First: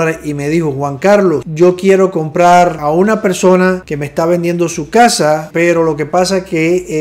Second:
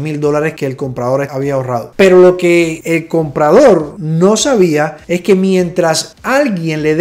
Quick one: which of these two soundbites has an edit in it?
first; 4 cuts; at 1.5 s, 2.8 s, 3.9 s, 5.5 s

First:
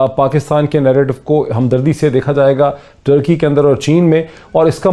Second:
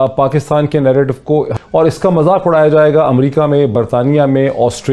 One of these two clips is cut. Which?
second; 1 cut; at 1.5 s

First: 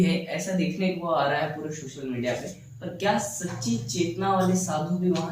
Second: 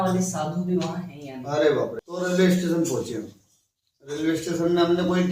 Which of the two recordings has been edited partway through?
second; 1 cut; at 2.0 s

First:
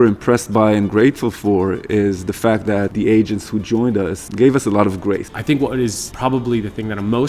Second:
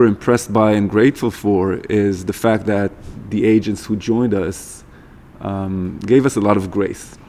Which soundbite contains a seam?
first; 4 cuts; at 2.9 s, 4.2 s, 5.3 s, 6.0 s

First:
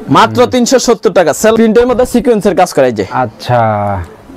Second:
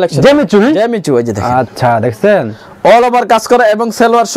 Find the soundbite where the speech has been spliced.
first; 1 cut; at 1.5 s

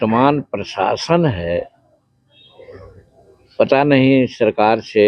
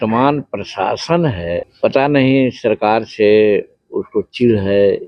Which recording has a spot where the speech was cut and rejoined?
second; 1 cut; at 1.7 s

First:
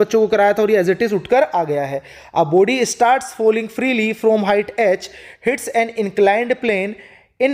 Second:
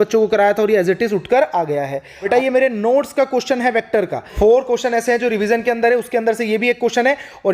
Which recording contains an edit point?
second; 2 cuts; at 2.2 s, 4.3 s

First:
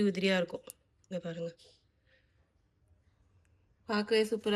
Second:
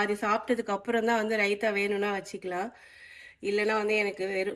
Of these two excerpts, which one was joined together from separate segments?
first; 1 cut; at 2.8 s

